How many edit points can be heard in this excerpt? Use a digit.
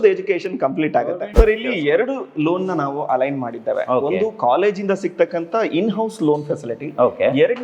1